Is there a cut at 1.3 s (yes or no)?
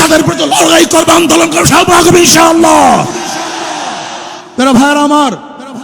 no